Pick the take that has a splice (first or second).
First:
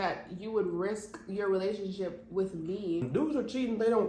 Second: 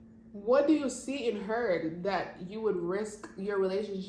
first